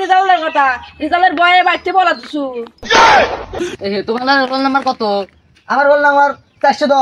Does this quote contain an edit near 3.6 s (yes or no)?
yes